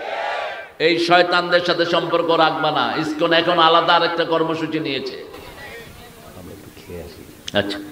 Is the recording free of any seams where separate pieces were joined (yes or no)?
yes